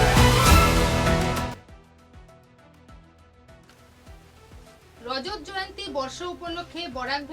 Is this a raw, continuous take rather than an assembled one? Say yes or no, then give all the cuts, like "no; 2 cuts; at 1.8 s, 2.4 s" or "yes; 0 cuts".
no; 2 cuts; at 1.6 s, 3.7 s